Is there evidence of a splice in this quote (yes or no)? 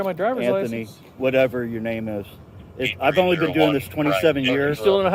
no